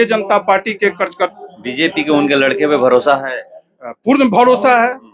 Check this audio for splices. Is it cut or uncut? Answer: cut